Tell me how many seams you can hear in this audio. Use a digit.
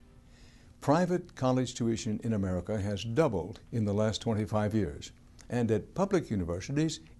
1